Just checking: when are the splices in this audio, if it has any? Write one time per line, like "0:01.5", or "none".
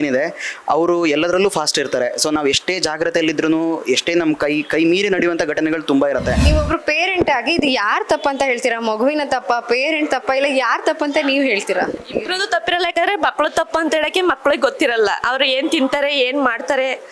0:06.4

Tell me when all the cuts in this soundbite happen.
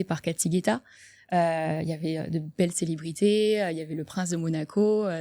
none

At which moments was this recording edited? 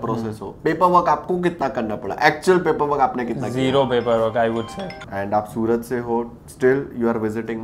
0:05.0

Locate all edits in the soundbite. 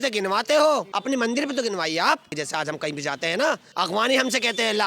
0:00.9
0:02.4
0:03.7

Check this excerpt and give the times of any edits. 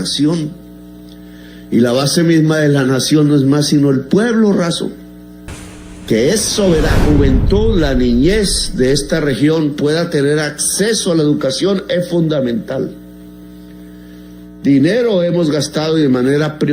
0:06.9

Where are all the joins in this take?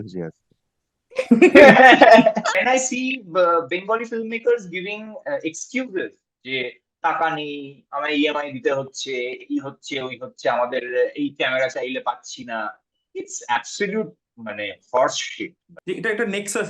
0:02.6
0:15.7

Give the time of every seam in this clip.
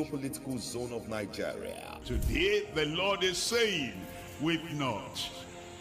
0:01.7

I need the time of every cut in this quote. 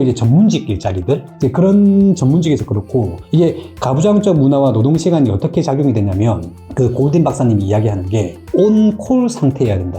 0:01.3

